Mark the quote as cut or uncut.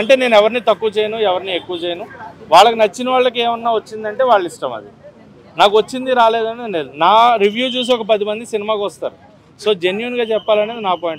uncut